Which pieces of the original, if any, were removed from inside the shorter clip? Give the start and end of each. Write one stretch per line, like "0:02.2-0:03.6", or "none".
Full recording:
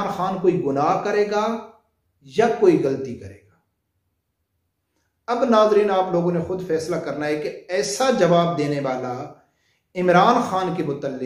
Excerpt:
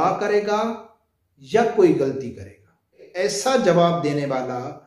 0:03.9-0:07.6